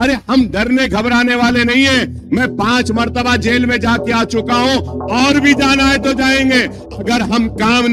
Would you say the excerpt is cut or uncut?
cut